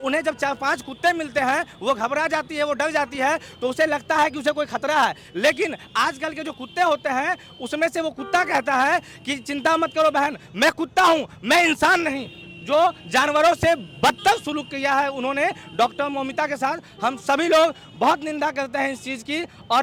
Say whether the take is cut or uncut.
uncut